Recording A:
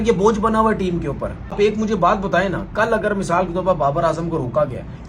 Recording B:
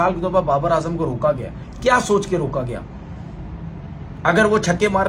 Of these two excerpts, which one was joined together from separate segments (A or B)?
A